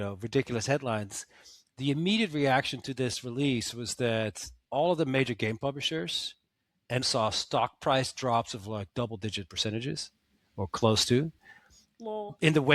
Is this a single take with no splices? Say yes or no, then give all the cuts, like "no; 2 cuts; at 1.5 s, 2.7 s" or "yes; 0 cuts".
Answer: no; 1 cut; at 7.0 s